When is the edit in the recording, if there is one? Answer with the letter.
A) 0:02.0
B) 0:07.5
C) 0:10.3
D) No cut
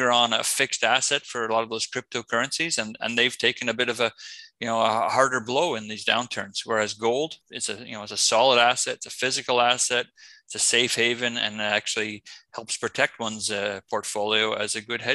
B